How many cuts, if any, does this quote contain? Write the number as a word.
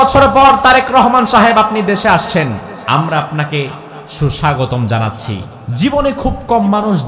two